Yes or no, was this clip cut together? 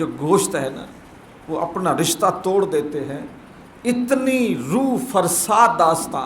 no